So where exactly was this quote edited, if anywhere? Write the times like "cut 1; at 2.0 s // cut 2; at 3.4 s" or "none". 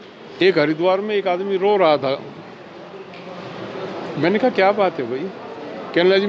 none